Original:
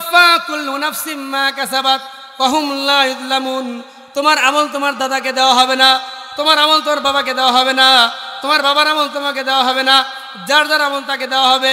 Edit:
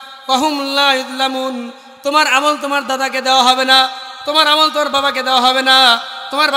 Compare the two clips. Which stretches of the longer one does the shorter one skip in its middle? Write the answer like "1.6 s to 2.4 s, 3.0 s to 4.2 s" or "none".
none

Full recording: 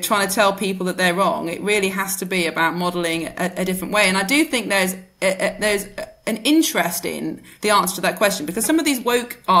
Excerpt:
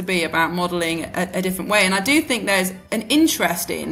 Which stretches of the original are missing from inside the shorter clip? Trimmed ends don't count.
5.0 s to 6.1 s

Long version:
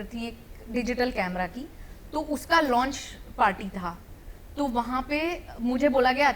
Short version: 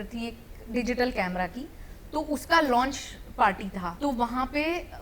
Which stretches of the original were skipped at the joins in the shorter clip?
3.9 s to 4.4 s

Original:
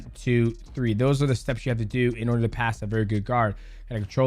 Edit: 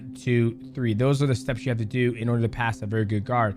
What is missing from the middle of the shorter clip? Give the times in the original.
none

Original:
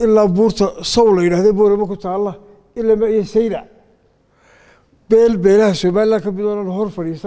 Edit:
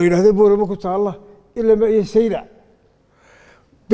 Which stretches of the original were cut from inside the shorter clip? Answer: none

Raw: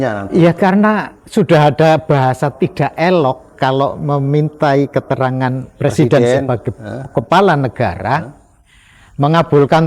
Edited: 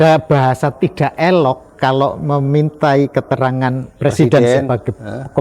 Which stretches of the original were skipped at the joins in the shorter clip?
none

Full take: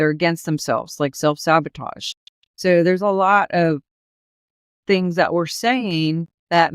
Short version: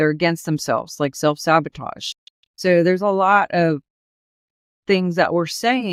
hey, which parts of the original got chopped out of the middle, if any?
none

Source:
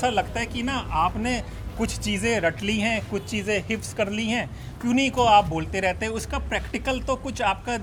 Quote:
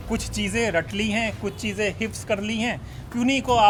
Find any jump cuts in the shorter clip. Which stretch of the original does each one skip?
none

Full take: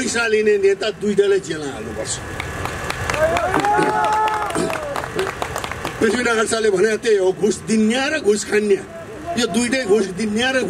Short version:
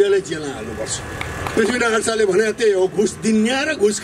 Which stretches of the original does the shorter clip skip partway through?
2.7 s to 5.9 s

